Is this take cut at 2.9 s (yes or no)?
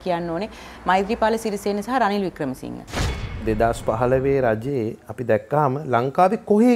yes